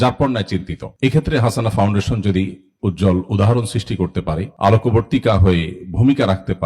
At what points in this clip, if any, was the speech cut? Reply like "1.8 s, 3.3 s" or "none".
none